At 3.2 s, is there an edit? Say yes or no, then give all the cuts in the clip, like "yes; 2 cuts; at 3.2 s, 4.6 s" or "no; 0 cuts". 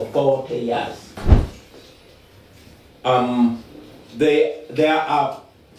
no; 1 cut; at 1.2 s